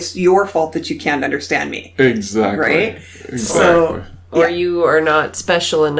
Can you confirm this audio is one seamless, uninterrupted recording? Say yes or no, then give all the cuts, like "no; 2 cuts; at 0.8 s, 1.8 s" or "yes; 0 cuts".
yes; 0 cuts